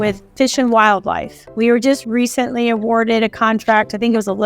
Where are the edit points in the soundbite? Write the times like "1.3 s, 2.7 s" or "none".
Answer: 2.0 s

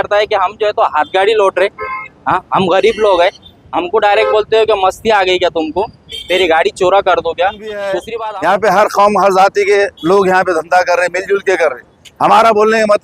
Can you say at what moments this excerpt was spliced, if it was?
8.1 s

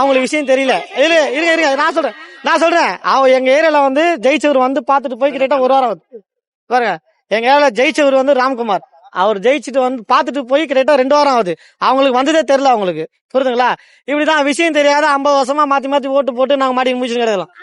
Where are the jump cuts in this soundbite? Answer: none

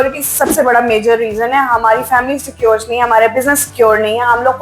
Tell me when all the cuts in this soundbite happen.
none

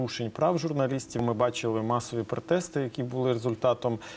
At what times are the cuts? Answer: 1.2 s

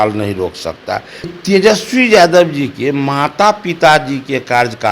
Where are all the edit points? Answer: 1.3 s

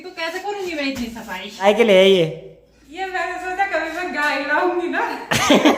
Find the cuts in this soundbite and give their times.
1.6 s

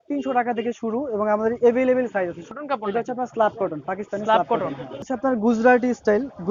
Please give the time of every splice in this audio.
2.4 s, 5.0 s

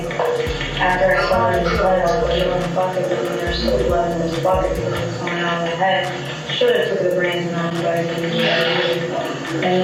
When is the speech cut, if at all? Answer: none

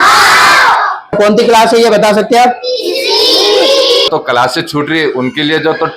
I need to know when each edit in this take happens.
1.1 s, 4.1 s

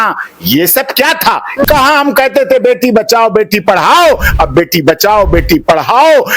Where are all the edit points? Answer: 1.6 s

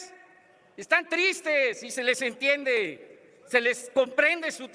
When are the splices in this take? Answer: none

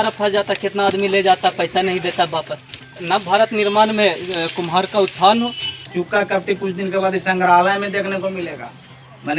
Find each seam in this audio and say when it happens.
3.0 s, 5.9 s

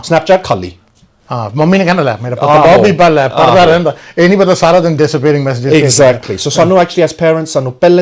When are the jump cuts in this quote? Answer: none

